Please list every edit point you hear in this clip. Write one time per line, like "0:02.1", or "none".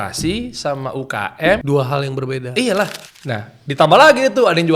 0:01.6
0:03.0